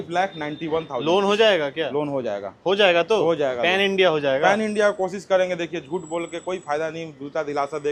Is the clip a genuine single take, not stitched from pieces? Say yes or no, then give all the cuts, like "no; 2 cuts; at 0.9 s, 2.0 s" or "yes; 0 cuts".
yes; 0 cuts